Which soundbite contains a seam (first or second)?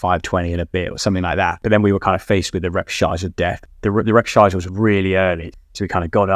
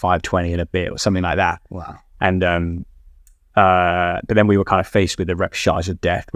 first